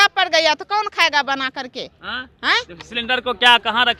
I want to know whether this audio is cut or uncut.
uncut